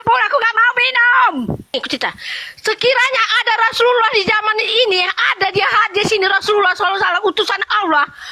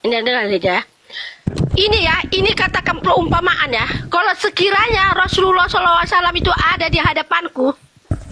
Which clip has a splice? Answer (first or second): first